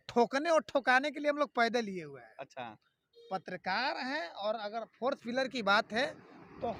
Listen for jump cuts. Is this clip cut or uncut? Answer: uncut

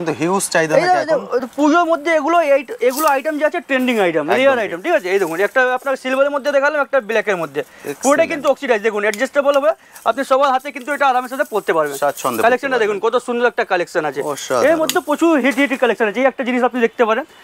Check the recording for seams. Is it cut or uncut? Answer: uncut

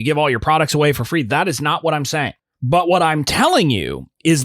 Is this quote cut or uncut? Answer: cut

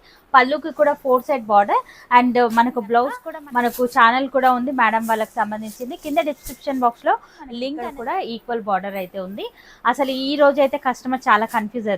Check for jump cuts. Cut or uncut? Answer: cut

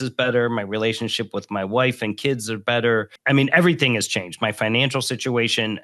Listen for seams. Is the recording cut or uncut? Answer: cut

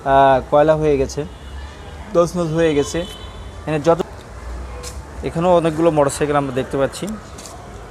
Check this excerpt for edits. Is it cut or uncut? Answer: cut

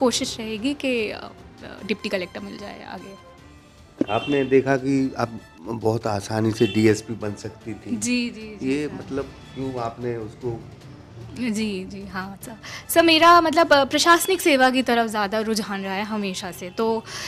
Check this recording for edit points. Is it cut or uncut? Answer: uncut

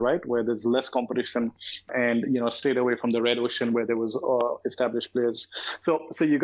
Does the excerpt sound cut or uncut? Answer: uncut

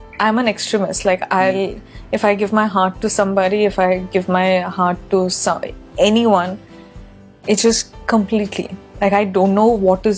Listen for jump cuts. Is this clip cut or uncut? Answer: uncut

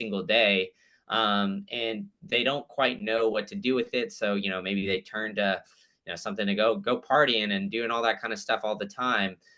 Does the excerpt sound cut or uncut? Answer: uncut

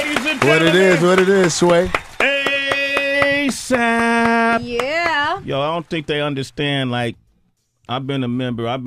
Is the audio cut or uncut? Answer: cut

